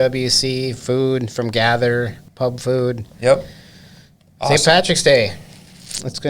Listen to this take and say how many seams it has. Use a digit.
1